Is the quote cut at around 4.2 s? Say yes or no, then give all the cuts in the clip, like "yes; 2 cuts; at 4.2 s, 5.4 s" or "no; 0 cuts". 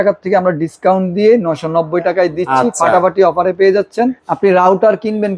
yes; 1 cut; at 4.2 s